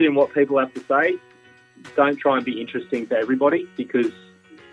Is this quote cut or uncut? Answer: uncut